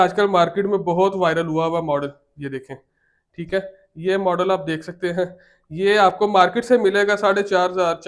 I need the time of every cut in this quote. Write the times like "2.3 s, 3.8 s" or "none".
none

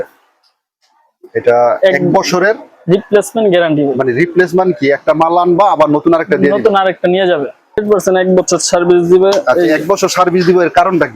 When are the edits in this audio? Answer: 7.8 s

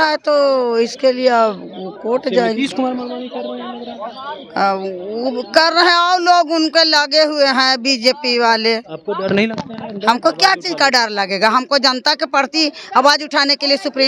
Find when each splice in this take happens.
none

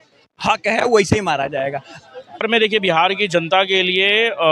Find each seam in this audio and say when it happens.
2.5 s

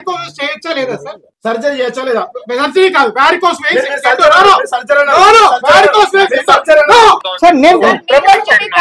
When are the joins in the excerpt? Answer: 1.2 s, 7.3 s

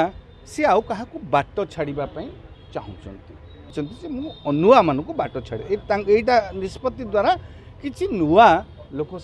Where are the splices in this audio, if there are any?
3.7 s

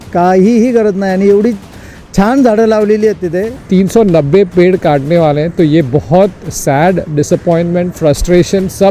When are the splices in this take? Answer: 3.5 s

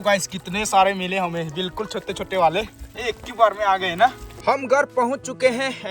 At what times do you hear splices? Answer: 4.3 s

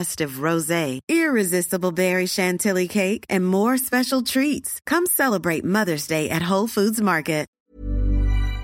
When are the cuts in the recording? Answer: 7.5 s

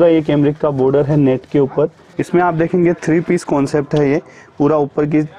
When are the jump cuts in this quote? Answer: 2.1 s

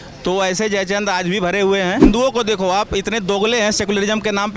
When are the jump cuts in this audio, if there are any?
2.0 s

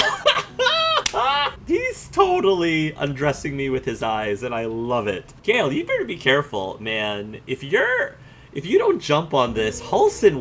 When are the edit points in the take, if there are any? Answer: 1.5 s, 5.4 s

